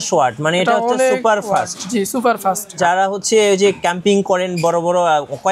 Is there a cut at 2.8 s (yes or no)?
yes